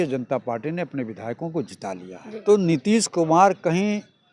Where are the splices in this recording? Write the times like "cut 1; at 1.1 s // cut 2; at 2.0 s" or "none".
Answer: cut 1; at 2.4 s

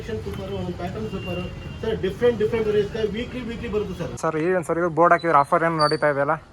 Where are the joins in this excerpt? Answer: cut 1; at 4.1 s

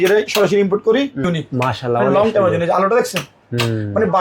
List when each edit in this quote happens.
cut 1; at 1.2 s

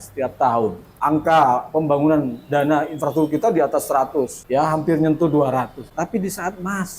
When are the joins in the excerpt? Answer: cut 1; at 0.9 s // cut 2; at 4.4 s // cut 3; at 5.8 s

